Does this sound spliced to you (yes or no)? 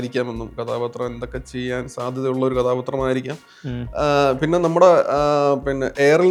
no